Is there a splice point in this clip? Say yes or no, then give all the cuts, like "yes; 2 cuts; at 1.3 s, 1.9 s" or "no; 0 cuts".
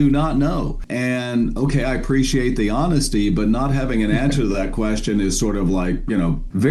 no; 0 cuts